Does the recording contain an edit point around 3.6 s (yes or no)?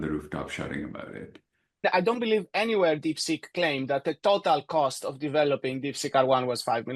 no